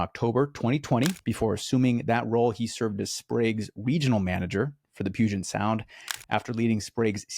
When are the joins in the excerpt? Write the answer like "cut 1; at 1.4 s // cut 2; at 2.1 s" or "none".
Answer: cut 1; at 1.2 s